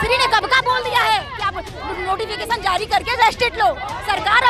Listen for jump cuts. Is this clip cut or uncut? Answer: uncut